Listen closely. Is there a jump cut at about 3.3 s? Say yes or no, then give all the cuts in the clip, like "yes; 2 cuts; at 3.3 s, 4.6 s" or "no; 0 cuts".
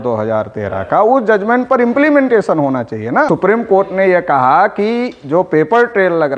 yes; 1 cut; at 3.3 s